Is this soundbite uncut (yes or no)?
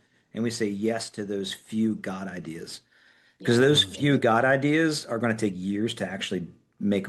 yes